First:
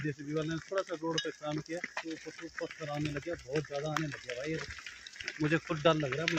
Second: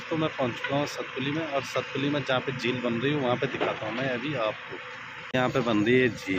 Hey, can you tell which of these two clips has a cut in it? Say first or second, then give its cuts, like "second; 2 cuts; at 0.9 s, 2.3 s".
second; 1 cut; at 5.3 s